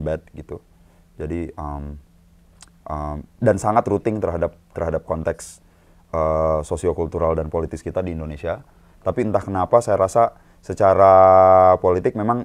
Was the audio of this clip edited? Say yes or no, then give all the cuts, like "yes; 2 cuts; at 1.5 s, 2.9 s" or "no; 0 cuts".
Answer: no; 0 cuts